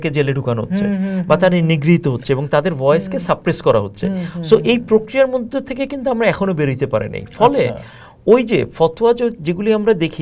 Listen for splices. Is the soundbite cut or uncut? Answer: uncut